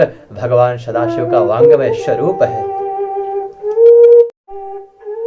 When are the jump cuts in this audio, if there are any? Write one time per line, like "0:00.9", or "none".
0:04.4